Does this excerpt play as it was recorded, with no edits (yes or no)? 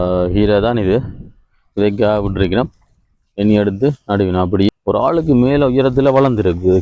no